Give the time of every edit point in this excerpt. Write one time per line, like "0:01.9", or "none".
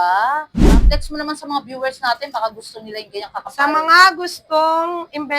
0:00.9